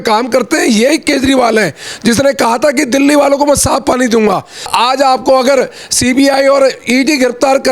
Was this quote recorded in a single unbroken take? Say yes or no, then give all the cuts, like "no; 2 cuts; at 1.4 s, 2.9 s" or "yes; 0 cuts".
no; 1 cut; at 4.7 s